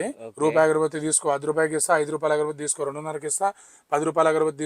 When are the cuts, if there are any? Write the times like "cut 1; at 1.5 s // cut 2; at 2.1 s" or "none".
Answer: none